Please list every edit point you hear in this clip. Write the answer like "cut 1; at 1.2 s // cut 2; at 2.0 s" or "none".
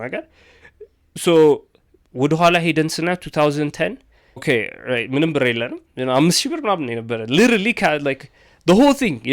cut 1; at 4.4 s